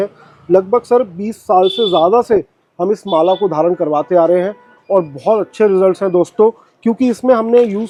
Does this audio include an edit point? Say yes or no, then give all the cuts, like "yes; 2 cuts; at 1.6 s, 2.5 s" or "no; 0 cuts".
no; 0 cuts